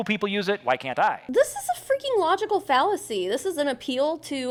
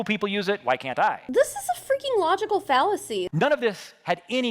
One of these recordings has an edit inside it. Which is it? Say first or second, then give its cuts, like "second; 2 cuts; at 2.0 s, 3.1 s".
second; 1 cut; at 3.3 s